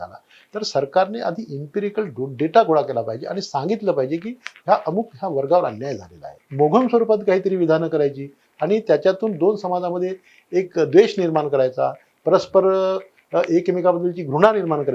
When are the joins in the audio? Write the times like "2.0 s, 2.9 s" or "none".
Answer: 6.4 s

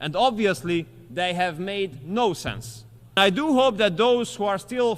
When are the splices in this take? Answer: 3.2 s

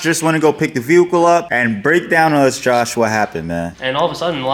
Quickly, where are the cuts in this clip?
1.5 s, 3.7 s

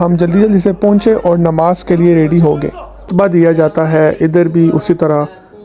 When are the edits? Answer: 3.1 s

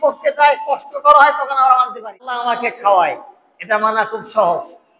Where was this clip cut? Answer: 2.4 s

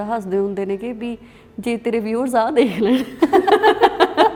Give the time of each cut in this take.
none

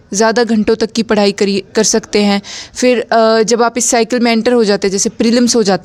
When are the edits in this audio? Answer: none

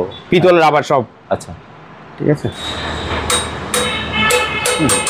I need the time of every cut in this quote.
2.7 s

